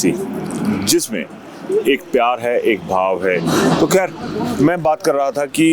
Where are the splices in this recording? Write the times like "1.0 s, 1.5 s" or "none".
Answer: none

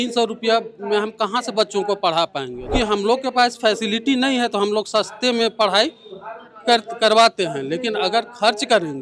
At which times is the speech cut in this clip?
2.7 s

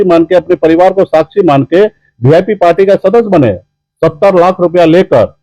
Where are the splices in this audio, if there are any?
3.7 s

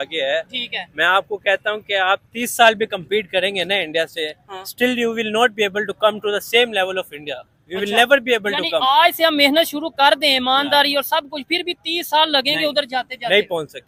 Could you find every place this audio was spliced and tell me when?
none

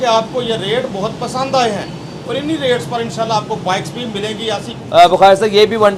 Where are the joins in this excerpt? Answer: 4.7 s

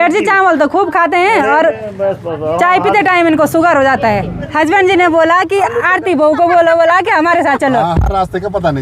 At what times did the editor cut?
4.4 s

